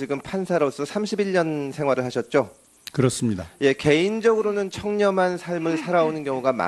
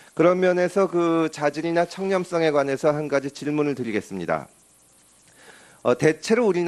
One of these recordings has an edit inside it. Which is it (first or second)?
first